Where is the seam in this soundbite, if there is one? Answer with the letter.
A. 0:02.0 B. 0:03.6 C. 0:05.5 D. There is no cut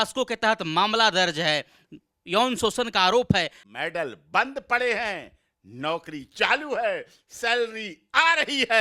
B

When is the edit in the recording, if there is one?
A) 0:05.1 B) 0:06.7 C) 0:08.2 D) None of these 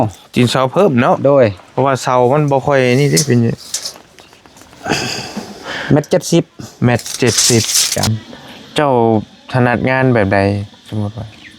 C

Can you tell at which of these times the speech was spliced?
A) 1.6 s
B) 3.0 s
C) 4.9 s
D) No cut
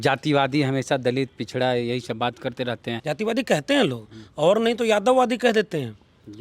B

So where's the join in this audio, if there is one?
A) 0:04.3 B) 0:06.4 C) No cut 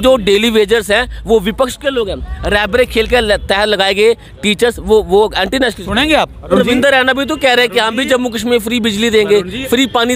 B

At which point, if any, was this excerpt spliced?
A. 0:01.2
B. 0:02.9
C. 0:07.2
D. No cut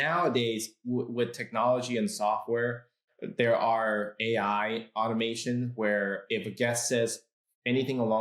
D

